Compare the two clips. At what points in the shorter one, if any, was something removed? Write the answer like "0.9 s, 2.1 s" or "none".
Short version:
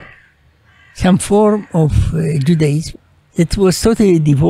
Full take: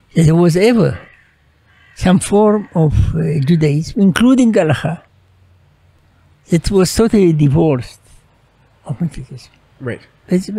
2.9 s